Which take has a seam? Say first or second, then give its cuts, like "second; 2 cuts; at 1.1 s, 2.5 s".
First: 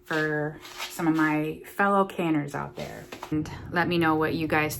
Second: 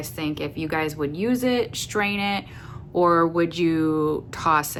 first; 1 cut; at 3.3 s